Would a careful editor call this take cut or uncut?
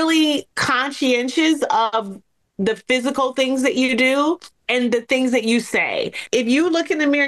cut